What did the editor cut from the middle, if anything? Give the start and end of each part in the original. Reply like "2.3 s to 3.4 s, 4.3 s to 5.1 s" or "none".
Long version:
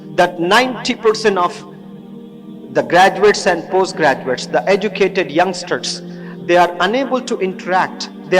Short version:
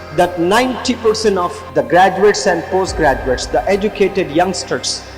1.6 s to 2.6 s

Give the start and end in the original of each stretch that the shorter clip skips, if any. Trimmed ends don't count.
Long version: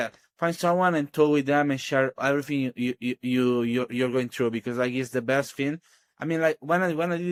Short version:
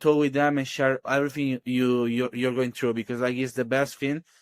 2.7 s to 3.2 s

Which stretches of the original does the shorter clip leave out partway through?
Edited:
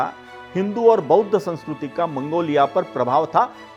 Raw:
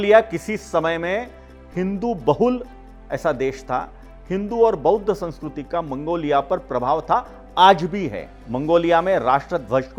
none

